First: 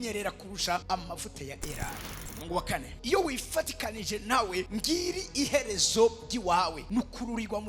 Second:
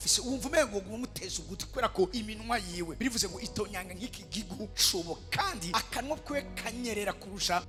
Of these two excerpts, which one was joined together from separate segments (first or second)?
first